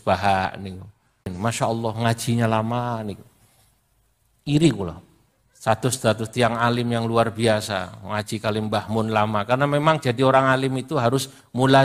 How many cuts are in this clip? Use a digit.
1